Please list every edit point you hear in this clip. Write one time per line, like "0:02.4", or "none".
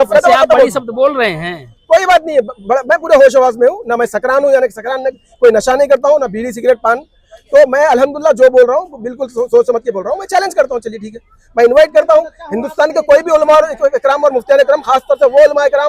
none